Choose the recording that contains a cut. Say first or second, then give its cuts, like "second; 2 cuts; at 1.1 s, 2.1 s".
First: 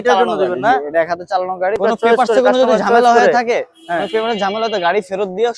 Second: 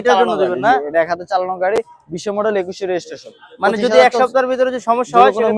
first; 1 cut; at 1.8 s